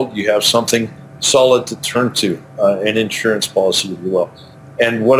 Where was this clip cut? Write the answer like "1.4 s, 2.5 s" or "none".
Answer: none